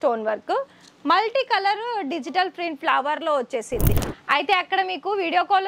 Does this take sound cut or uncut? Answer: cut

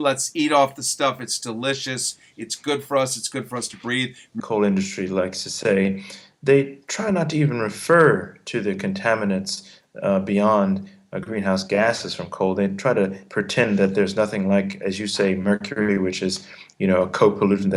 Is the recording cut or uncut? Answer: uncut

